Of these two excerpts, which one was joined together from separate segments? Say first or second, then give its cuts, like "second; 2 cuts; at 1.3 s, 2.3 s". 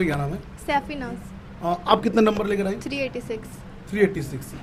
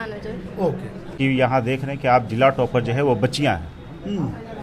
second; 1 cut; at 1.2 s